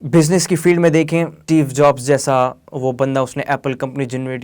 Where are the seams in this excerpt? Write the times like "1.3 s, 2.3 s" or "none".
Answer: 1.4 s